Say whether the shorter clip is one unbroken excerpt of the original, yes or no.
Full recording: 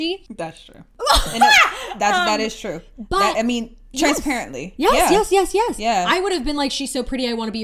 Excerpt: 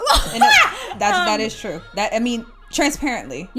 no